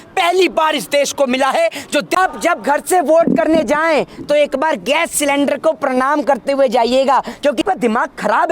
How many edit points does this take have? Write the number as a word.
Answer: two